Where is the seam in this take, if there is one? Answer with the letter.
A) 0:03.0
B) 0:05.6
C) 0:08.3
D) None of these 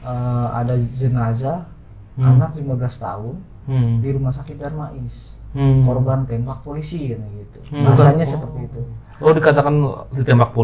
D